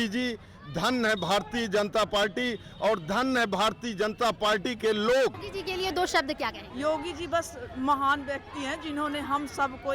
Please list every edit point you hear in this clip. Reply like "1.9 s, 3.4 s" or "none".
5.5 s, 6.6 s

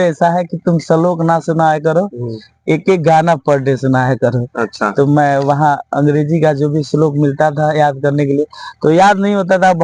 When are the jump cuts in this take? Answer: none

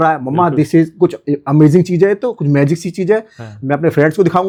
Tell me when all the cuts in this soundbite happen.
none

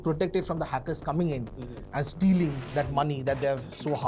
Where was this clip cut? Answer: none

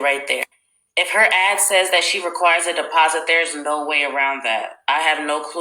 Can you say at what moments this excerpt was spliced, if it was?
1.6 s

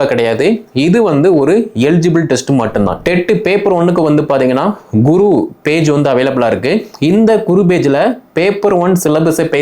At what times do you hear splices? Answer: 3.0 s

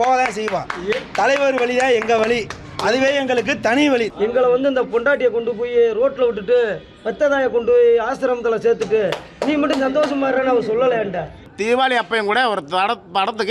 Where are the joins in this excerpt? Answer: 4.1 s, 11.5 s

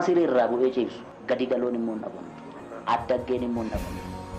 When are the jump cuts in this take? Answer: 1.1 s

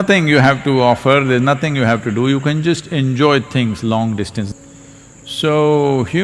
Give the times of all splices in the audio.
4.5 s

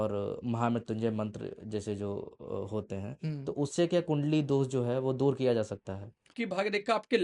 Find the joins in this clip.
6.3 s

